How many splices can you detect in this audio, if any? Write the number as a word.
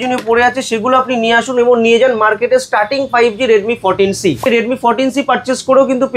one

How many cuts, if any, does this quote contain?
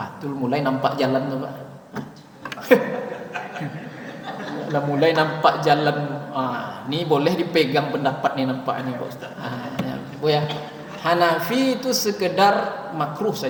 zero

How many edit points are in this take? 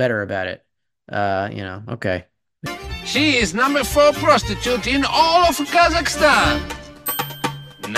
zero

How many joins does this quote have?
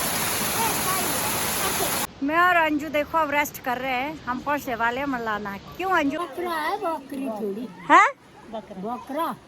two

